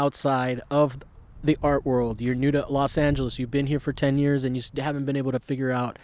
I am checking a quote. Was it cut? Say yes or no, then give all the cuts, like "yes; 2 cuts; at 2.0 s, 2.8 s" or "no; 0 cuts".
no; 0 cuts